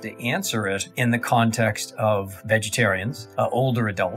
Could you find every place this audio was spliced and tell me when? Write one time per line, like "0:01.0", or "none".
0:00.9
0:02.4
0:03.2